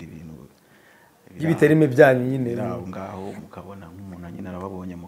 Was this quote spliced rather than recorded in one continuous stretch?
no; 0 cuts

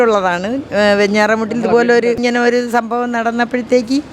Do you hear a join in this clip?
yes; 1 cut; at 2.2 s

